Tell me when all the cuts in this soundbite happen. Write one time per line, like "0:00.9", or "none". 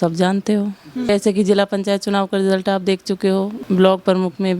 0:03.6